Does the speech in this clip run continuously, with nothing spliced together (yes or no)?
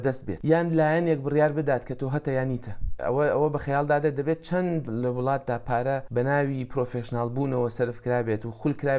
no